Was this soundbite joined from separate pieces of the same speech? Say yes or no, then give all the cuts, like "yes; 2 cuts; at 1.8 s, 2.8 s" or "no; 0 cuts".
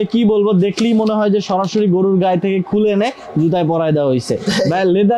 no; 0 cuts